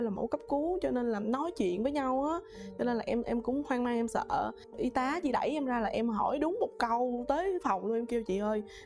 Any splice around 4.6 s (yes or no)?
no